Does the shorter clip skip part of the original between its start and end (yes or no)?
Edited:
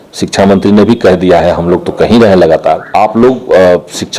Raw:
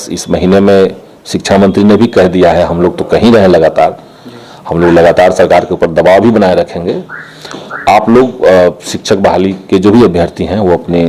yes